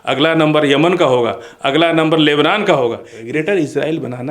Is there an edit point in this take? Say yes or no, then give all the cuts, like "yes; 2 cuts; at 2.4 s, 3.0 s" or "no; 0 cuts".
yes; 1 cut; at 3.1 s